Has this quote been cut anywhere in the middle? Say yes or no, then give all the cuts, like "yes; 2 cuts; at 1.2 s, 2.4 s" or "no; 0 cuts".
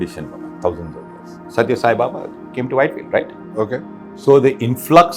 yes; 1 cut; at 1.4 s